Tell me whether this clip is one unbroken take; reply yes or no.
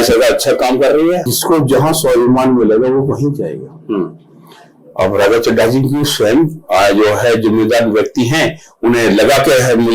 no